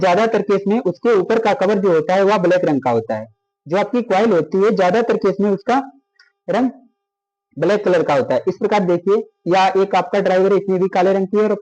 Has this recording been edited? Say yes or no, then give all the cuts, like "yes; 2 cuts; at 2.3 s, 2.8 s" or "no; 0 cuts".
no; 0 cuts